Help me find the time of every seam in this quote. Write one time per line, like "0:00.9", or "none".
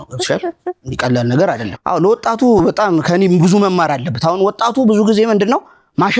0:01.7